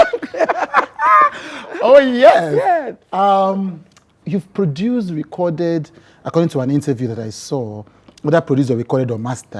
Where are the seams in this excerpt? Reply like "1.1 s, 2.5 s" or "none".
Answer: none